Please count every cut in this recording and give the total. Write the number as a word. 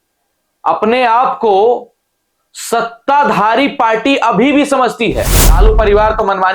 one